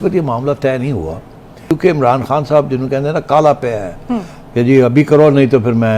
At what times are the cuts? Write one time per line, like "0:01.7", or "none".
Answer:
0:01.7